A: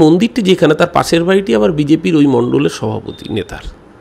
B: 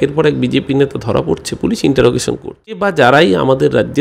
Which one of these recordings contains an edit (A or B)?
B